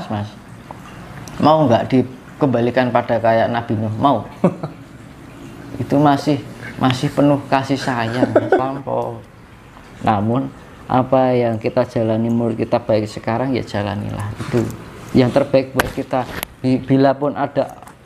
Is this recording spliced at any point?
yes; 1 cut; at 8.7 s

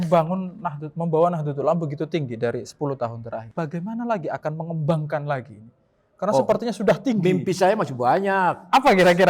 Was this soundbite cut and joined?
yes; 1 cut; at 3.5 s

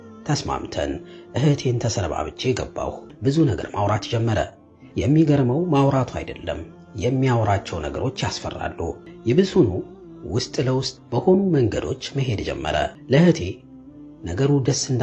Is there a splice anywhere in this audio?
yes; 3 cuts; at 3.1 s, 9.1 s, 13.0 s

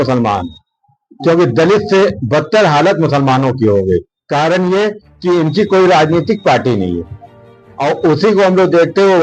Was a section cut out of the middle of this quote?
no; 0 cuts

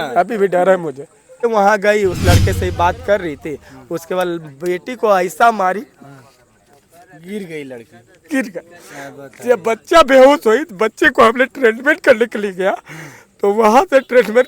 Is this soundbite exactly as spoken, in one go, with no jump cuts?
no; 1 cut; at 1.4 s

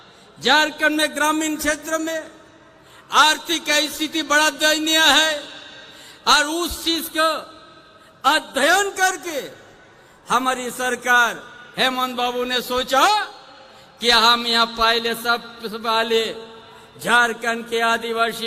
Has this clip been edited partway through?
no; 0 cuts

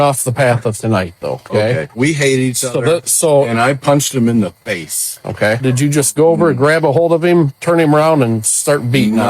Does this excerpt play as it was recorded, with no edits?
no; 2 cuts; at 1.9 s, 5.6 s

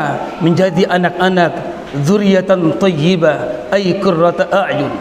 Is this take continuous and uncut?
yes; 0 cuts

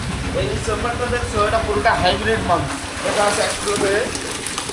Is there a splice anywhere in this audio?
yes; 1 cut; at 2.8 s

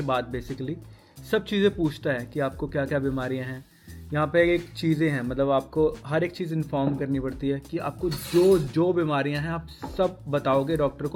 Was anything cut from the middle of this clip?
no; 0 cuts

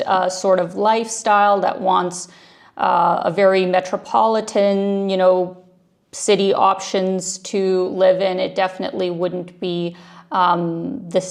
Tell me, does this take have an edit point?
no; 0 cuts

